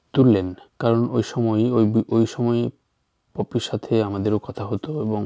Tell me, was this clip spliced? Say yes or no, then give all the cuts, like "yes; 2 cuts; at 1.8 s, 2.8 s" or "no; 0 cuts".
no; 0 cuts